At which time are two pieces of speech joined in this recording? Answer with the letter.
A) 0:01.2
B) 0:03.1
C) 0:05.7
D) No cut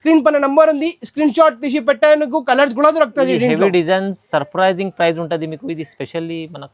D